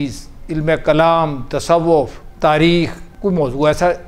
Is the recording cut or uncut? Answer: cut